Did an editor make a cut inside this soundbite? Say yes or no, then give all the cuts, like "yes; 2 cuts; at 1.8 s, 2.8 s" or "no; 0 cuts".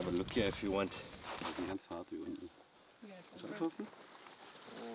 no; 0 cuts